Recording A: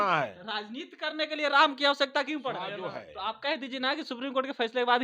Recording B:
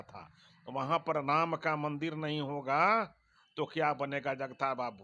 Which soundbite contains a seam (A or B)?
A